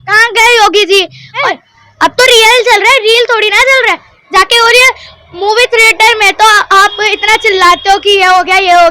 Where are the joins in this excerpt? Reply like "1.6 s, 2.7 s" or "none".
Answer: 1.5 s

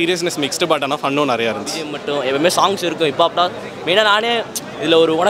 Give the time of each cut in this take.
2.0 s

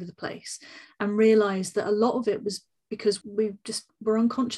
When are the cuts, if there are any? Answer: 3.2 s

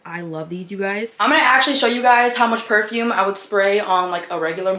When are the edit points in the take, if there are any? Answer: 1.1 s

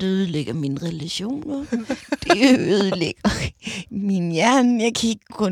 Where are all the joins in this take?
1.7 s

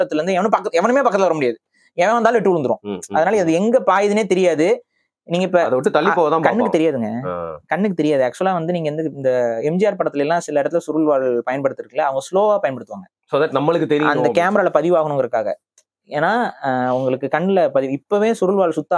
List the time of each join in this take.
none

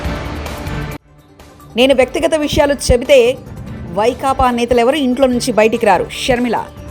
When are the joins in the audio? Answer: 1.1 s

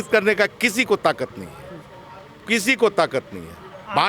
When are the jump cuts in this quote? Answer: none

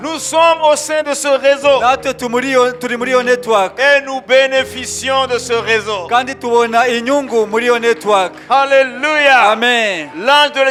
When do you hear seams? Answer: none

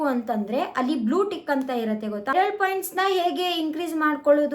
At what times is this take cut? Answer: 2.3 s

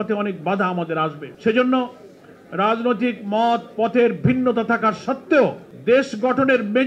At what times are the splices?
1.3 s, 5.7 s

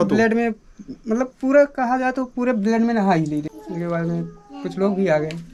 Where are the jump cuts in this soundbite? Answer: none

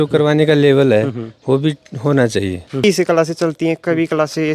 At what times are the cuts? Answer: 2.8 s

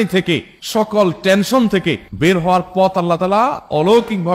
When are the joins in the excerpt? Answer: none

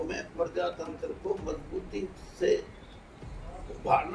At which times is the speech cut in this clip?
none

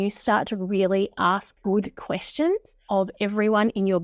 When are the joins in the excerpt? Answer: 1.5 s, 2.7 s

